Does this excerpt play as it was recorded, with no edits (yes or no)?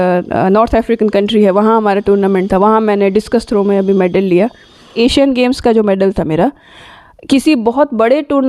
no